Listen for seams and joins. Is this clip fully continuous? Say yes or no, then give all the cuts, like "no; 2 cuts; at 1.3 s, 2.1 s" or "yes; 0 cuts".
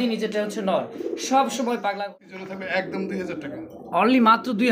no; 1 cut; at 2.1 s